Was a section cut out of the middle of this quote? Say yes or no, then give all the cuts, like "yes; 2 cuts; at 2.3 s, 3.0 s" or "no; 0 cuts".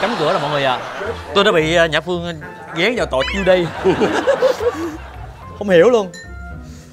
no; 0 cuts